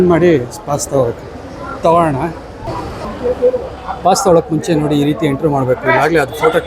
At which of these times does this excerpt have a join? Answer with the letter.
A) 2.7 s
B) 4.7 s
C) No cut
A